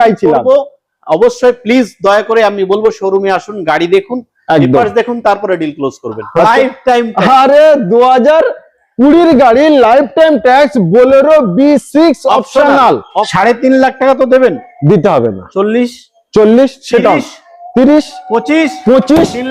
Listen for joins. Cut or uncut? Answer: cut